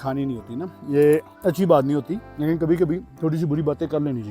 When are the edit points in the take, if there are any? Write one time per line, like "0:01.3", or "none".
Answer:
0:01.3
0:02.2
0:03.1